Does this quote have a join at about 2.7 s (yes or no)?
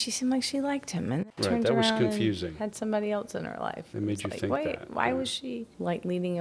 no